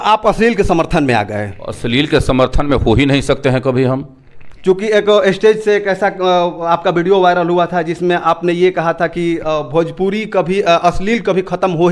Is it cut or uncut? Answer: uncut